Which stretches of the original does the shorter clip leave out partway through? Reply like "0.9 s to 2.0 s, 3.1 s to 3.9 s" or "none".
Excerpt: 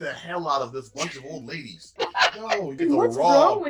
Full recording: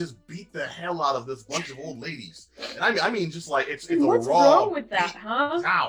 2.7 s to 3.3 s